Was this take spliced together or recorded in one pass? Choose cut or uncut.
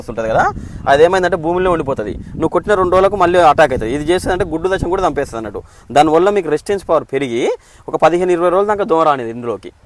uncut